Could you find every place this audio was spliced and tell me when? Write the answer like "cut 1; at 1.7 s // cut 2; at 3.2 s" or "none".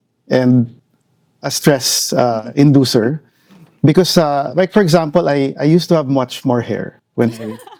none